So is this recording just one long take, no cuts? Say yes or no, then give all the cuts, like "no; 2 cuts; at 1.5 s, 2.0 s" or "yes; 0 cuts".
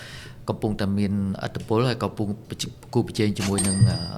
yes; 0 cuts